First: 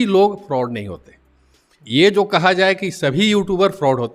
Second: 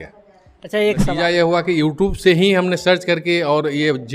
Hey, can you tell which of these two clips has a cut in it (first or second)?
second